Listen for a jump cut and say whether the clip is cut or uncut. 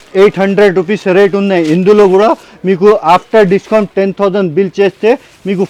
uncut